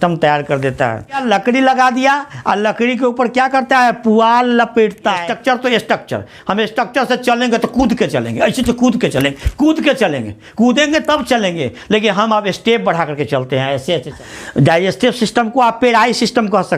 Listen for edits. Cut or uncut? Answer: cut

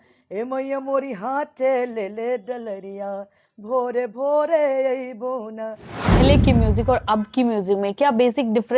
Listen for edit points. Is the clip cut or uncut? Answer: cut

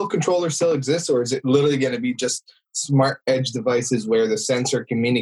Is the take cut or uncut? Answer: uncut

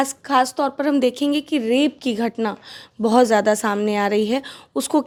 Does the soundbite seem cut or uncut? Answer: uncut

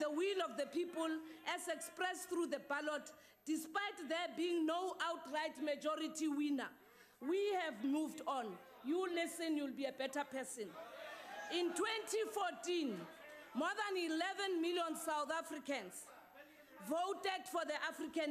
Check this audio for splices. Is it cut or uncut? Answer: uncut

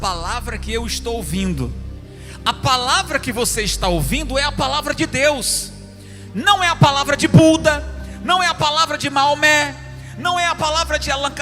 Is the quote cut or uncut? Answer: uncut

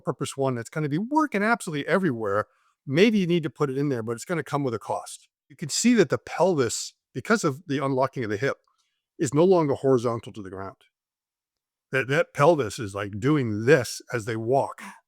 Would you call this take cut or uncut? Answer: cut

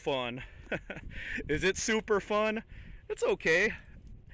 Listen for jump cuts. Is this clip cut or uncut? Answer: uncut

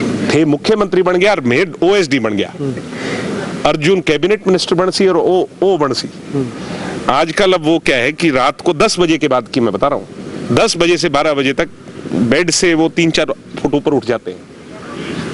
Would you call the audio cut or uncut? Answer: uncut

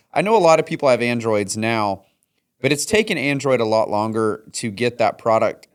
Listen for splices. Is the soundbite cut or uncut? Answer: uncut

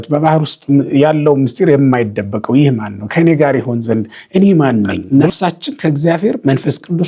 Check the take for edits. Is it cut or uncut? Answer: cut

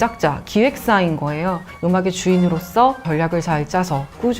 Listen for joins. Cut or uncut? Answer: cut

